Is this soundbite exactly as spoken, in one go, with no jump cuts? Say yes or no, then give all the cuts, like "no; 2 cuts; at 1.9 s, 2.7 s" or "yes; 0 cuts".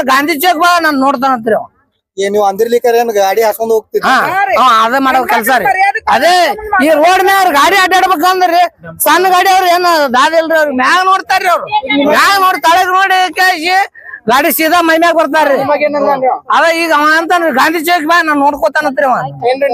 yes; 0 cuts